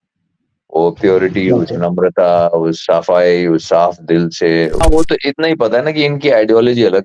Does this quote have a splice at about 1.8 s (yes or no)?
no